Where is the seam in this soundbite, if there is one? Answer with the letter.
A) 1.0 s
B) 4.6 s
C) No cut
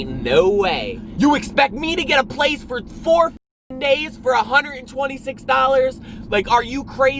A